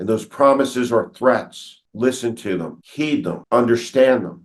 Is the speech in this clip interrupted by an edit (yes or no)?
yes